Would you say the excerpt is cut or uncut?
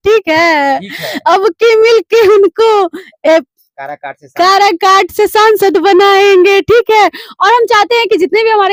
uncut